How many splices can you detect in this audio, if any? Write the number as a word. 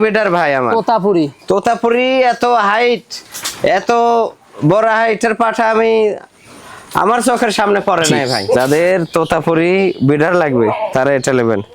one